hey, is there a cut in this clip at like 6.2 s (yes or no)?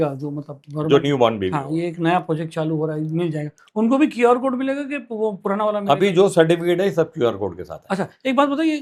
no